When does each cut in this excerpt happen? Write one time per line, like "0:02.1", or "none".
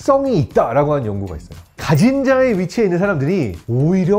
0:01.8